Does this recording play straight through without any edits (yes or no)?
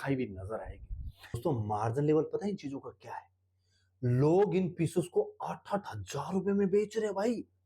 no